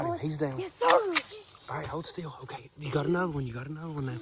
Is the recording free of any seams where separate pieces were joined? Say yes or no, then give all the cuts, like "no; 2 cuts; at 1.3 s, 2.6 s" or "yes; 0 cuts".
yes; 0 cuts